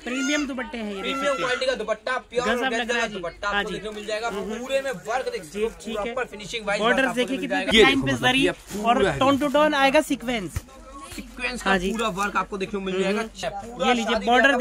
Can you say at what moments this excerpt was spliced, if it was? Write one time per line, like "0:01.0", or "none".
0:07.7
0:13.4